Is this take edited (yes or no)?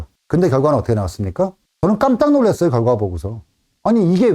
yes